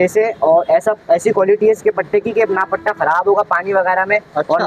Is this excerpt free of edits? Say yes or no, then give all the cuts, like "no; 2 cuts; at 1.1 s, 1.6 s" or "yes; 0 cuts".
yes; 0 cuts